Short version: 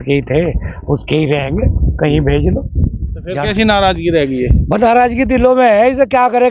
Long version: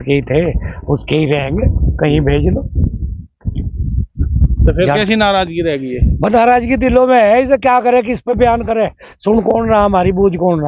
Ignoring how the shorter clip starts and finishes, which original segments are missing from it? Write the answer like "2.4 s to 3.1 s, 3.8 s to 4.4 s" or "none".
3.4 s to 4.9 s